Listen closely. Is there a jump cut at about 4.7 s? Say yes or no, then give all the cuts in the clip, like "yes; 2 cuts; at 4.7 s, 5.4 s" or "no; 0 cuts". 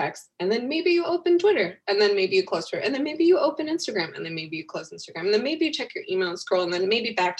no; 0 cuts